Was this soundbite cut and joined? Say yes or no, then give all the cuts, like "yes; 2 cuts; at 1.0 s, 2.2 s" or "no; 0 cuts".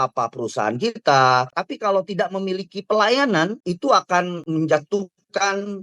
yes; 3 cuts; at 1.6 s, 3.6 s, 4.4 s